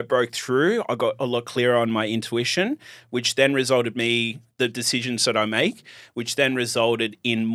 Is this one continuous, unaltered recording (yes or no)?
yes